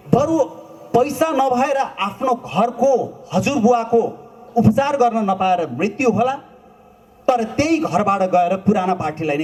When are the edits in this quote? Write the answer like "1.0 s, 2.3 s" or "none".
none